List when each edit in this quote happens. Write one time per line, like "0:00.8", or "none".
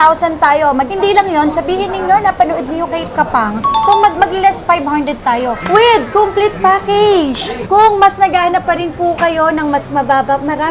0:00.9
0:07.6